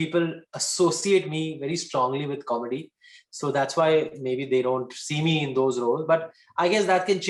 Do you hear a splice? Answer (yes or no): no